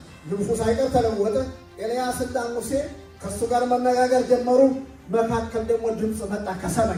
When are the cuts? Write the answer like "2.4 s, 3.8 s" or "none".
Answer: none